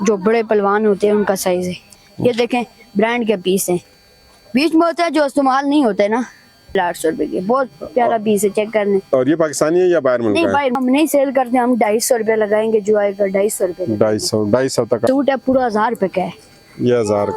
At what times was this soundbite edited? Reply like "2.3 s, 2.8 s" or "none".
2.0 s, 6.7 s, 10.8 s, 15.1 s